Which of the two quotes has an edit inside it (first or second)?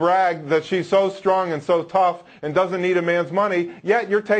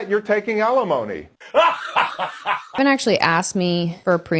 second